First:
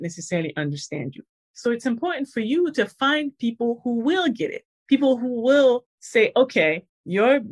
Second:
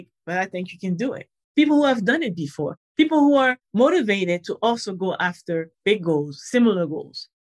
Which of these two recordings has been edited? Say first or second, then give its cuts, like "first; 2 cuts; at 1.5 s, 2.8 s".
first; 1 cut; at 1.3 s